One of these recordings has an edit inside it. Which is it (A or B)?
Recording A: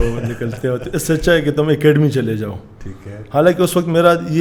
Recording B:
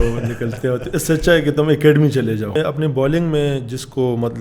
B